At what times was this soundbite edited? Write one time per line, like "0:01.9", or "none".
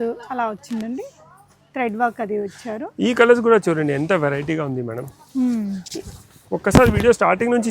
none

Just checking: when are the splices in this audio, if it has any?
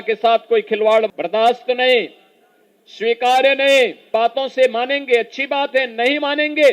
0:01.2
0:04.1

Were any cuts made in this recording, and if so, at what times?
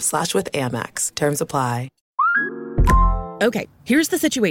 0:02.0

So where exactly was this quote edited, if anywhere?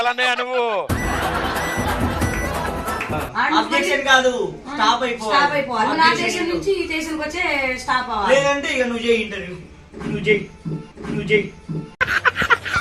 0:03.2

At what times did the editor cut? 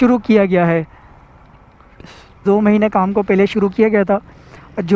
0:02.4

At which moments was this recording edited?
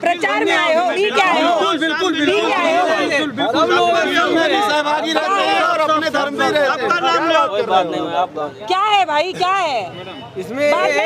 0:00.9

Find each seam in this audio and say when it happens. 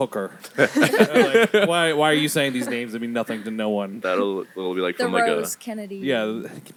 none

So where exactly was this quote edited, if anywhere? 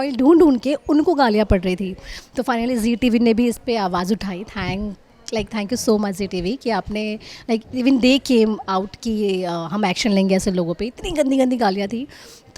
none

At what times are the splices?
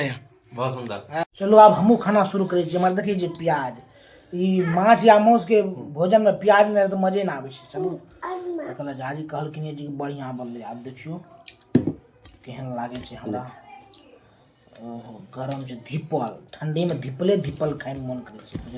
0:01.2

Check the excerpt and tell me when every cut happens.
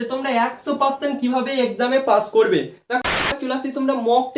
0:03.0

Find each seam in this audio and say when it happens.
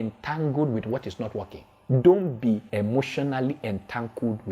0:02.7

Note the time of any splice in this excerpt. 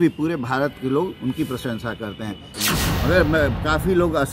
0:02.5

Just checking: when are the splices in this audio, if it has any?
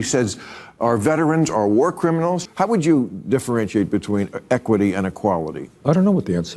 0:02.4
0:05.6

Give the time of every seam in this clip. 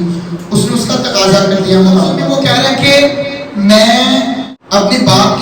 0:02.2
0:04.5

